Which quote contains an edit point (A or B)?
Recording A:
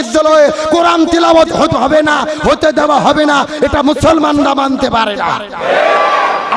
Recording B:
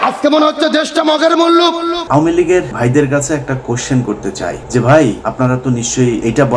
B